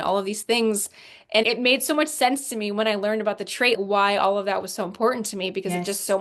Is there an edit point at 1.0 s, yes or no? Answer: no